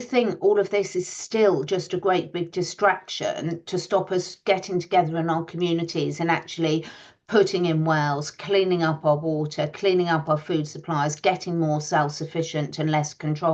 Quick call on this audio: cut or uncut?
uncut